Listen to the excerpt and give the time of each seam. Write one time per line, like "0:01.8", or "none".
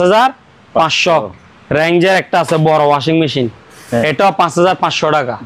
none

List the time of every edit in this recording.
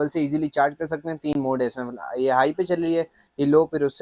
none

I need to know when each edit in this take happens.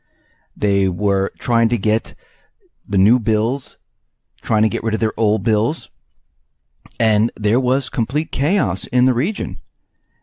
0:03.6

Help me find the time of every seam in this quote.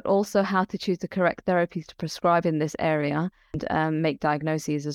0:03.9

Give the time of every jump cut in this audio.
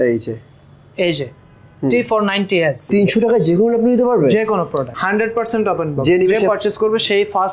0:02.8
0:04.9

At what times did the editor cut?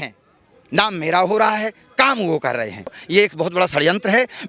0:03.0

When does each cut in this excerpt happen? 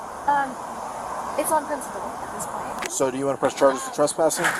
0:02.9

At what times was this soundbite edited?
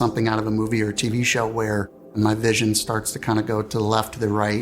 0:02.1

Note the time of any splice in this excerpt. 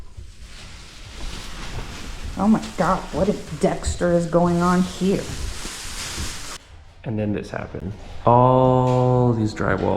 0:06.6

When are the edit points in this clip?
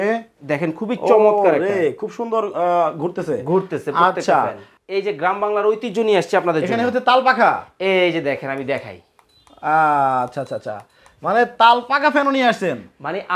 0:04.7

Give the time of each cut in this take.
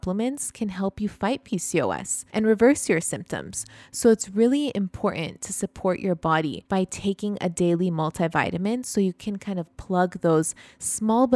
0:02.1
0:06.6

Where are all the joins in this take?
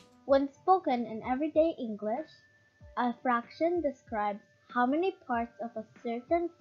none

